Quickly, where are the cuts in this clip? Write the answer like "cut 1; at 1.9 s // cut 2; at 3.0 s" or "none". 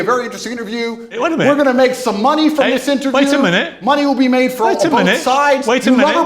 cut 1; at 1.2 s // cut 2; at 5.3 s